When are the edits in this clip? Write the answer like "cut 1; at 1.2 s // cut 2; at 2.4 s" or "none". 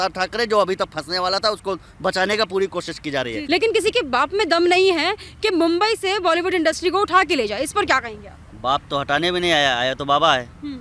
cut 1; at 3.4 s

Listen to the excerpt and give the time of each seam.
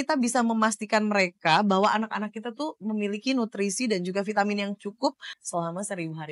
cut 1; at 5.3 s

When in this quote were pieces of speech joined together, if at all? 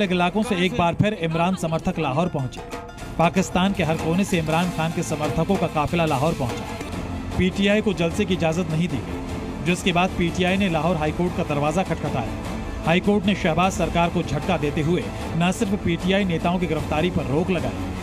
cut 1; at 6.8 s

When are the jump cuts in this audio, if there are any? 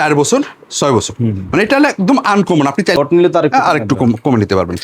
cut 1; at 3.0 s

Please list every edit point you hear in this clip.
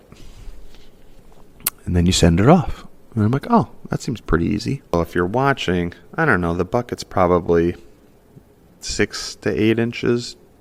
cut 1; at 4.9 s

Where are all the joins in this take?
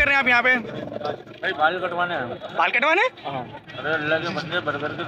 none

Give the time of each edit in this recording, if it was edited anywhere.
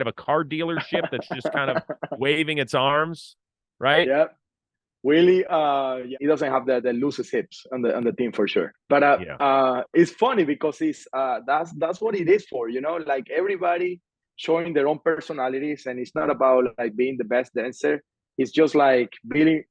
cut 1; at 6.2 s // cut 2; at 8.8 s

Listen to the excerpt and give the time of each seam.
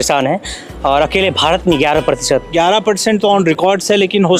cut 1; at 2.5 s

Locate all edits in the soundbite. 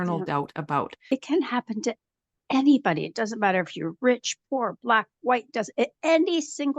cut 1; at 1.0 s

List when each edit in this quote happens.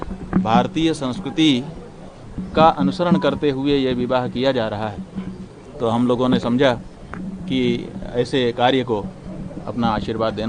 none

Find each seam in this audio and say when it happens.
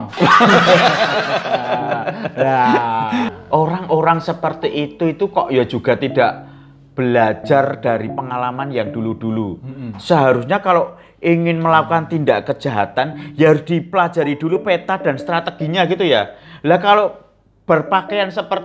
cut 1; at 3.4 s

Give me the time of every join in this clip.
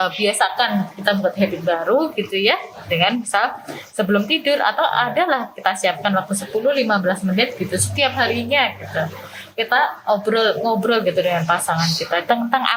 none

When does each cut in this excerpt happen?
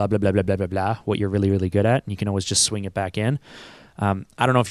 none

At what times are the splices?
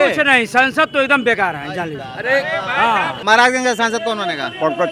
cut 1; at 3.1 s

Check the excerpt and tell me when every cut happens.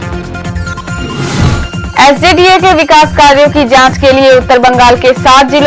cut 1; at 1.3 s

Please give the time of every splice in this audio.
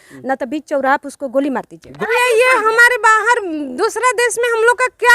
cut 1; at 1.8 s

